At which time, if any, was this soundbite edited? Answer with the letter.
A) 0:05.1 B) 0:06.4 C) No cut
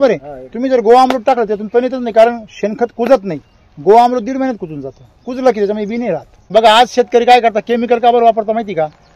B